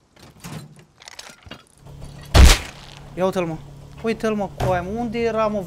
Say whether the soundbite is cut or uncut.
cut